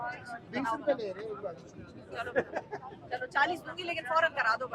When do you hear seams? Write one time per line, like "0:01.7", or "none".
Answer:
none